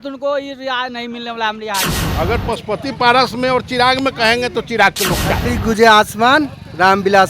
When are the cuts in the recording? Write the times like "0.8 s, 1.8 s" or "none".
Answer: 2.0 s, 5.5 s